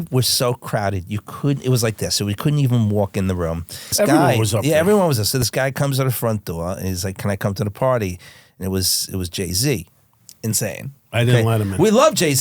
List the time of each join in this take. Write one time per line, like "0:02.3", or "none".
0:03.9